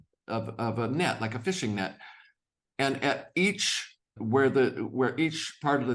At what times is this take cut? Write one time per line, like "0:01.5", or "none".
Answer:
0:04.2